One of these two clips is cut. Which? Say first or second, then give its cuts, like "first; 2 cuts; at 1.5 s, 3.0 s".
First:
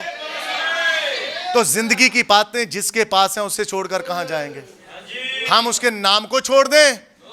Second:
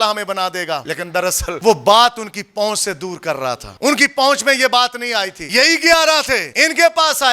second; 4 cuts; at 1.2 s, 3.7 s, 5.4 s, 6.5 s